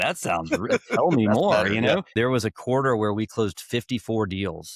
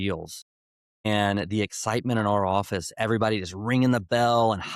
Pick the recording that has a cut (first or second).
first